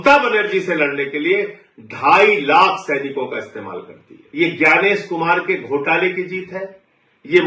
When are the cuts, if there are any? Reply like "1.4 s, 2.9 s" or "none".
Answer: 4.2 s